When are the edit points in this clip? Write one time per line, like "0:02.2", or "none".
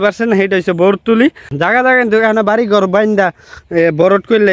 0:01.5